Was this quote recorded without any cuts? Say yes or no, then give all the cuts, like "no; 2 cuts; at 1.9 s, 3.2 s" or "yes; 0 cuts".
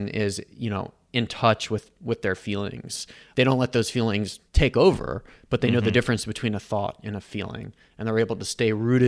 yes; 0 cuts